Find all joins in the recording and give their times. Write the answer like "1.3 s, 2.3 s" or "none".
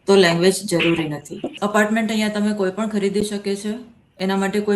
1.5 s